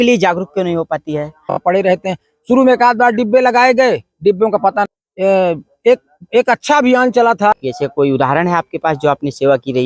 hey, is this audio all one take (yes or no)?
no